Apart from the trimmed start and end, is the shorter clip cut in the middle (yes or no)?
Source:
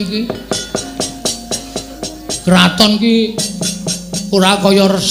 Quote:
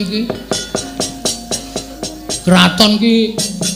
no